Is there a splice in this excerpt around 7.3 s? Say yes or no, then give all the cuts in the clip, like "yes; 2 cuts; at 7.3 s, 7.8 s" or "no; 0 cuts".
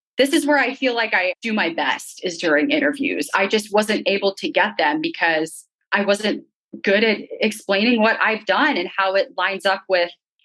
no; 1 cut; at 1.4 s